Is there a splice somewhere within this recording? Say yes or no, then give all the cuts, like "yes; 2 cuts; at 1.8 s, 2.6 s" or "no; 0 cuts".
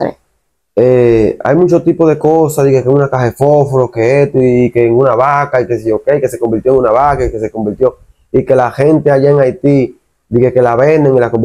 no; 0 cuts